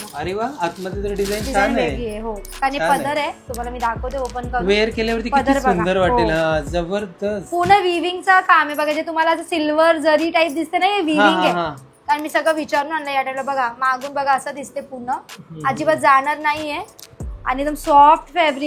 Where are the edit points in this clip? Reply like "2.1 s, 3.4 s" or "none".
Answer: none